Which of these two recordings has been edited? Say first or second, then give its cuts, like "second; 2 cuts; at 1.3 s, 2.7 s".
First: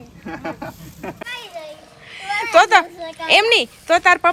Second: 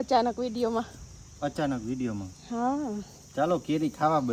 first; 1 cut; at 1.2 s